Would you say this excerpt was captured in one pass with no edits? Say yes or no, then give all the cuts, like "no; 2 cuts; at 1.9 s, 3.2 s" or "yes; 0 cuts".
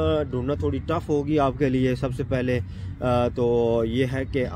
yes; 0 cuts